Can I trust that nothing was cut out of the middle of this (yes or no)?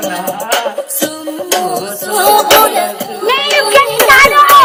yes